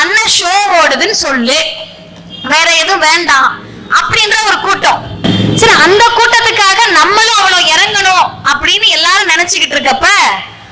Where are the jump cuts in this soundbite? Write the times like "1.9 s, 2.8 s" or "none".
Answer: none